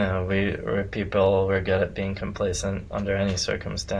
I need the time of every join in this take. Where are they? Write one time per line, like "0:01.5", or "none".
none